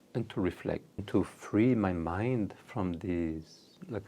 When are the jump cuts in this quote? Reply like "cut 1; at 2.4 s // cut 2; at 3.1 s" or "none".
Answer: cut 1; at 1.0 s